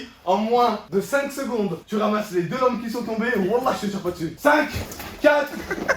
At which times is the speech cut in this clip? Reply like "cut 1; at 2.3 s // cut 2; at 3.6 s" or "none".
cut 1; at 0.8 s // cut 2; at 1.8 s // cut 3; at 4.5 s